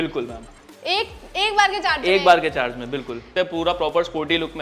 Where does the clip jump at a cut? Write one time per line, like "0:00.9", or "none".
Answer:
0:03.3